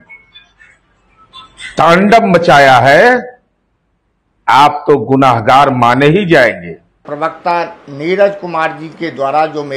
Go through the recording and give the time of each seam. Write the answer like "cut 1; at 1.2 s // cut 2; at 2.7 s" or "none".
cut 1; at 7.0 s